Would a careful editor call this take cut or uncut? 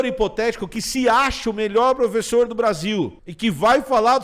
cut